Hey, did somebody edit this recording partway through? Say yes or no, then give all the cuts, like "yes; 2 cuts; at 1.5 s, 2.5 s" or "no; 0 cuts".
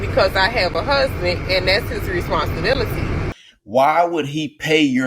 yes; 1 cut; at 3.3 s